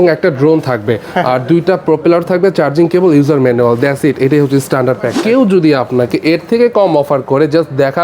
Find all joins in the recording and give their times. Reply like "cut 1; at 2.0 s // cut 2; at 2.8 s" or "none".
cut 1; at 5.2 s